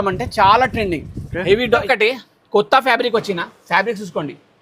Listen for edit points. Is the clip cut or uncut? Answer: cut